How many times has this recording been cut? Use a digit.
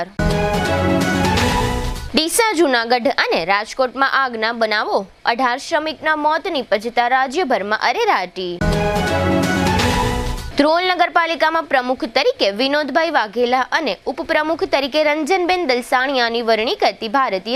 0